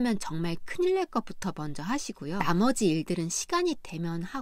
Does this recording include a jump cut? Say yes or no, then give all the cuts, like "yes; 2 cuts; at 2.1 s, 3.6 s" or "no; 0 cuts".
yes; 1 cut; at 2.4 s